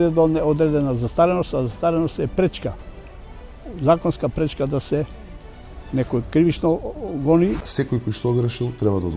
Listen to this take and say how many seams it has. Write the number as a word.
one